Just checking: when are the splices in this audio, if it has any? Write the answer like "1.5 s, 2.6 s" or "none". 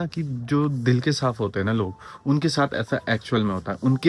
none